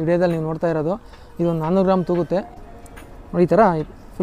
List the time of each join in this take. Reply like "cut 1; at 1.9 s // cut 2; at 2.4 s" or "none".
cut 1; at 2.5 s